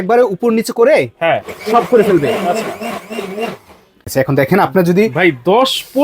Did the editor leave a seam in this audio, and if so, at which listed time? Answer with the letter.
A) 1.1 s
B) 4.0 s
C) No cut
B